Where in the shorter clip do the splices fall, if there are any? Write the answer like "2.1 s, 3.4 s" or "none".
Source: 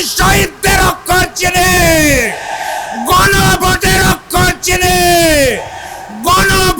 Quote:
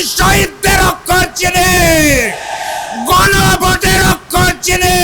none

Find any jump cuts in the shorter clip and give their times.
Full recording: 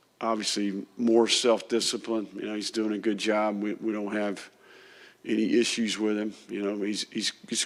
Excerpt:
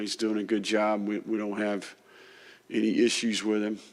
none

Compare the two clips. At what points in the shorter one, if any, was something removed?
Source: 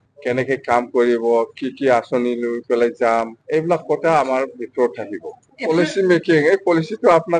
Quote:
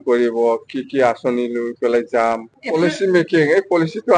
2.5 s

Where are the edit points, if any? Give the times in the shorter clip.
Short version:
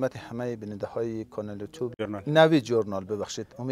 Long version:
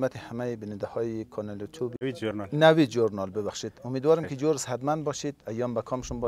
1.9 s

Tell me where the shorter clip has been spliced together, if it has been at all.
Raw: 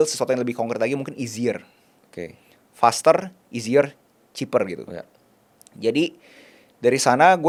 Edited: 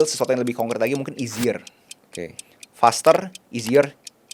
none

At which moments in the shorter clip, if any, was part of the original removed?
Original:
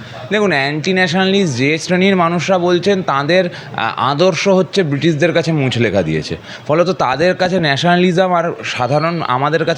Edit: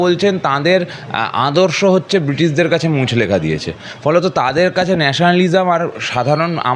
none

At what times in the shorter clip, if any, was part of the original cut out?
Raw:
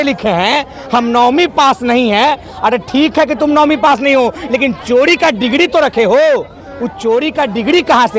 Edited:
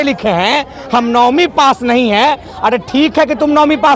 none

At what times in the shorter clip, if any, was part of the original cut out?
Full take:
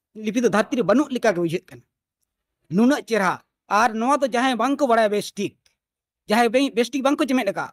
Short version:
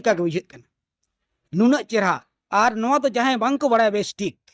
none

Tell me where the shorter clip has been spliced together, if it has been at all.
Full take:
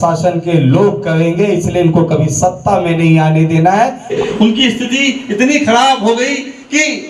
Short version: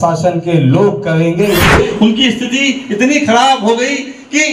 1.7 s

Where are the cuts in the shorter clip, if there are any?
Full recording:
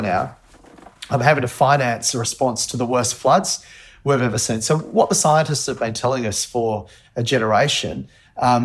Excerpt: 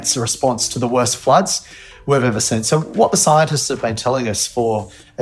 none

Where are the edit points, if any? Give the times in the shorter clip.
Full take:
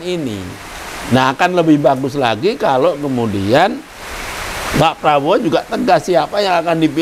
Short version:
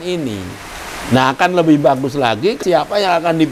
2.6 s

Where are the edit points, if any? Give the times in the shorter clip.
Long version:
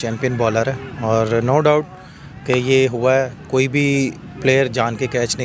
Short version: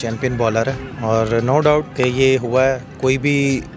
1.9 s

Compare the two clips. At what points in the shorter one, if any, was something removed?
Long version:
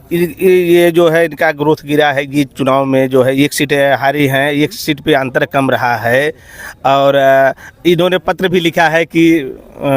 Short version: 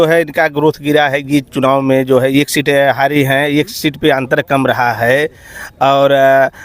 none

